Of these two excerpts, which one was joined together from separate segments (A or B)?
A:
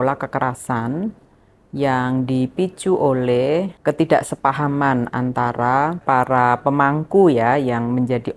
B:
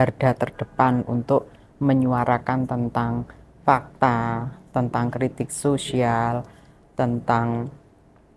A